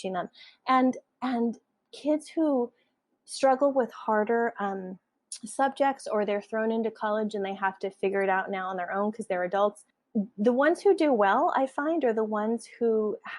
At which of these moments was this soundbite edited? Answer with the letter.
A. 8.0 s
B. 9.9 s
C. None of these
B